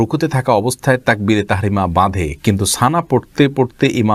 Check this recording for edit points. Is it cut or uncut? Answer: uncut